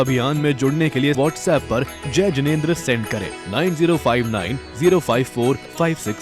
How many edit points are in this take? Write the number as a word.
zero